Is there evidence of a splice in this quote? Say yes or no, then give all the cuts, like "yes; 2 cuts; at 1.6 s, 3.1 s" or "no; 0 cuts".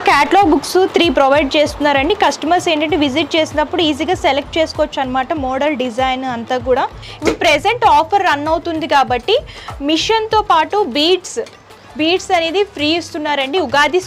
yes; 1 cut; at 7.1 s